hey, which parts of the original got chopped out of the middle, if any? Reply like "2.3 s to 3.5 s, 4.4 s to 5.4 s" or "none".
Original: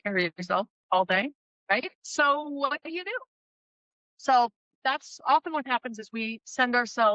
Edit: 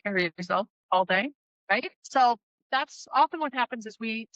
2.0 s to 4.1 s